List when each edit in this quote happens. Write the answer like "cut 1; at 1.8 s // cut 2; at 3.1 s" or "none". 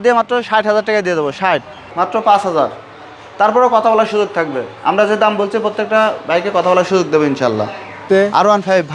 cut 1; at 1.9 s // cut 2; at 8.0 s